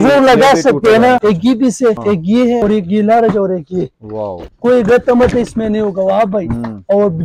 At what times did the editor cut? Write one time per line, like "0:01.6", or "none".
0:01.2
0:02.5
0:04.4